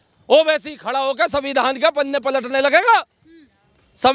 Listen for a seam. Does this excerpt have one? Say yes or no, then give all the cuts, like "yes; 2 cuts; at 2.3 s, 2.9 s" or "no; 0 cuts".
no; 0 cuts